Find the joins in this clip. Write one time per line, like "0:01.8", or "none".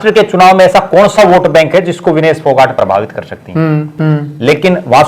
0:04.0